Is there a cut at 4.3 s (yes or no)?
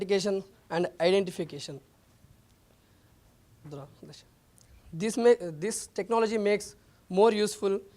yes